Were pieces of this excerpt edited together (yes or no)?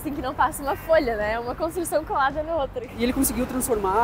yes